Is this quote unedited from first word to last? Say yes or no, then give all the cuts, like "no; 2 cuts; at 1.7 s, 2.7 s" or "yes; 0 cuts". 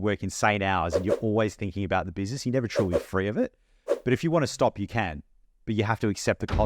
yes; 0 cuts